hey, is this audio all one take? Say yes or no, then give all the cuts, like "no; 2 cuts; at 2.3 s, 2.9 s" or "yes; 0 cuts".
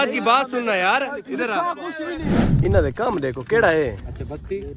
no; 1 cut; at 2.4 s